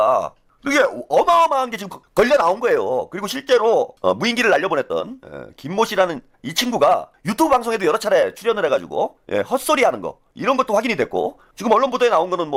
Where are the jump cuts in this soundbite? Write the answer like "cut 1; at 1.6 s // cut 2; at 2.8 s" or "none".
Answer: none

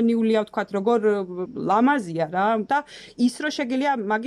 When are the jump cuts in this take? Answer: cut 1; at 1.5 s // cut 2; at 2.7 s

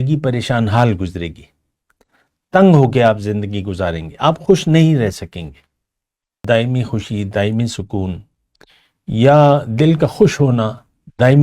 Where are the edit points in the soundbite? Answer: cut 1; at 6.4 s

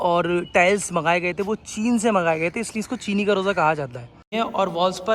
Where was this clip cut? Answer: cut 1; at 4.2 s

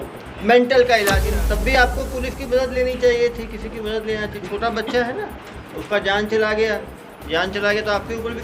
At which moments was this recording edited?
cut 1; at 1.3 s

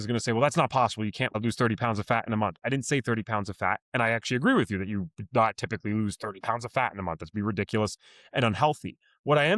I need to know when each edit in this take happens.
cut 1; at 1.4 s

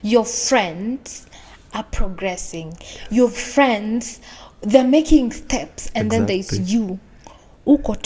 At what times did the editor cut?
none

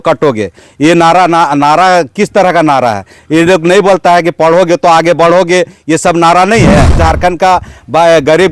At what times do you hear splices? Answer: cut 1; at 7.0 s

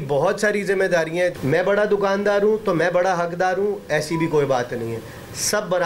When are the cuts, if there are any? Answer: cut 1; at 1.3 s

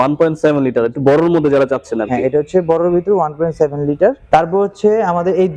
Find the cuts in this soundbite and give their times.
cut 1; at 4.2 s

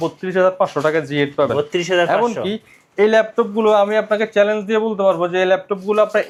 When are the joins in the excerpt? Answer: none

